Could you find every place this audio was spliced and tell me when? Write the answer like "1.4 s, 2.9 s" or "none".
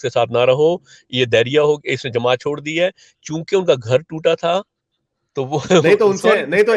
none